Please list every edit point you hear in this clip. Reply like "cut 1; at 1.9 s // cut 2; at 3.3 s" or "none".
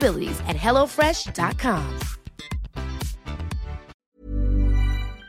cut 1; at 4.0 s